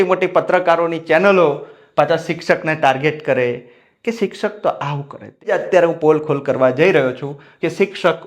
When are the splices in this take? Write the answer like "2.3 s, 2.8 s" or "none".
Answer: 5.5 s